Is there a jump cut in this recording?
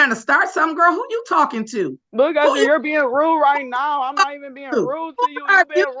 yes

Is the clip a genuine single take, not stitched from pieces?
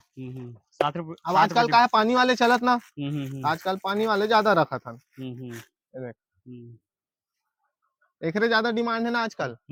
yes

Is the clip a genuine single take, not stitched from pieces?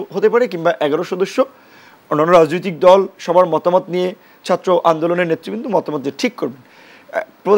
yes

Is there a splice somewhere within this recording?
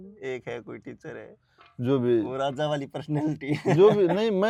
no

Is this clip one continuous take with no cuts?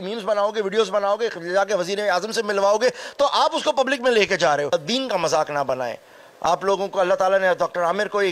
no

